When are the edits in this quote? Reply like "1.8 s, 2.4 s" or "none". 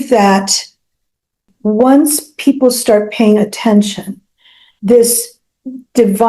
1.5 s